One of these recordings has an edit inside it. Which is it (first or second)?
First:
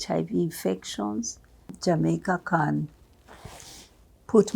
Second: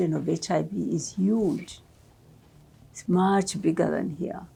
first